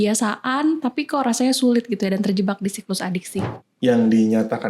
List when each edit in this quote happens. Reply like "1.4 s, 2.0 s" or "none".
3.6 s